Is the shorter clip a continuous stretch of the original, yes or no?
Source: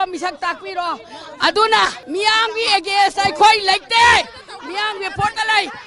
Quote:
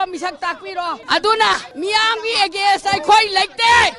no